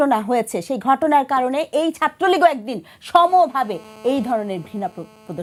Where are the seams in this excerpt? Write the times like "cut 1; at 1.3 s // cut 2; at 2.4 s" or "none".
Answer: none